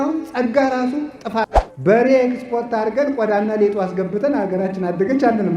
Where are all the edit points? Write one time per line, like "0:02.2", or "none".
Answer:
0:01.6